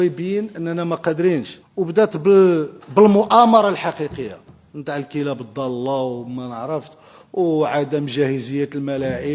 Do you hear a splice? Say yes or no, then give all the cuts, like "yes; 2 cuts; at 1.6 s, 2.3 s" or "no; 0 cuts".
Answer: yes; 1 cut; at 1.6 s